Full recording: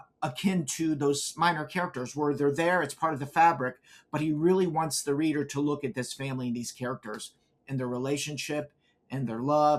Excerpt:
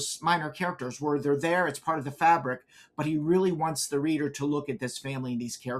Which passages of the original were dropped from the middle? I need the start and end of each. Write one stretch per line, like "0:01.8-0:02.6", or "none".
none